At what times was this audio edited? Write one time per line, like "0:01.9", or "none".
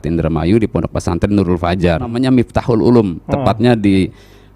0:02.1